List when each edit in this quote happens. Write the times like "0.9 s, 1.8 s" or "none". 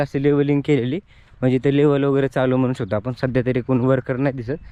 none